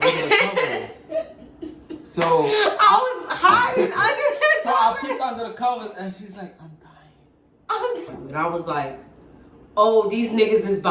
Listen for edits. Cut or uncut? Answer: cut